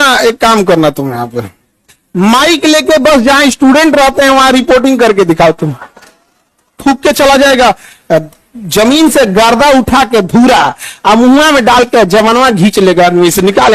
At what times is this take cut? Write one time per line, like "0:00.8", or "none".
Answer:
0:06.8